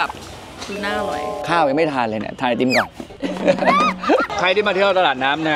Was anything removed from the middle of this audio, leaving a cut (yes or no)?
yes